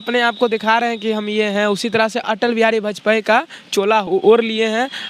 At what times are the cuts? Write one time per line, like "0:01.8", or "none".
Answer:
0:02.2
0:04.1